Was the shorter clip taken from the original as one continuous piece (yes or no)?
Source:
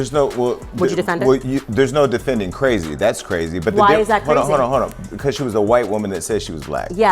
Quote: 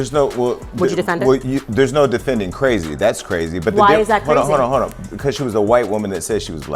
yes